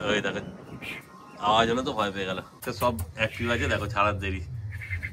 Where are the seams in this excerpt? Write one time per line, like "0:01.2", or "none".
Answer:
0:02.6